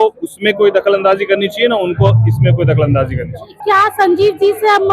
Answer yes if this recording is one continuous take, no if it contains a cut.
no